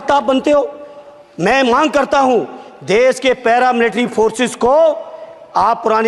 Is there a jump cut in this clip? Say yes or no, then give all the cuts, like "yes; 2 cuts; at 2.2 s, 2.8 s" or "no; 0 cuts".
no; 0 cuts